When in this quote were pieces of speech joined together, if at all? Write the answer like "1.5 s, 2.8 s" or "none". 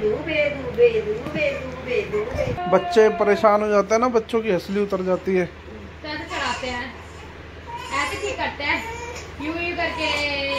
2.6 s